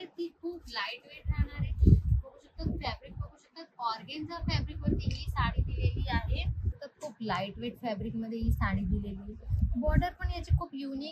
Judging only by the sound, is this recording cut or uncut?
cut